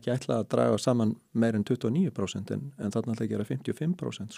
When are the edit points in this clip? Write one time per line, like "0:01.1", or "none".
none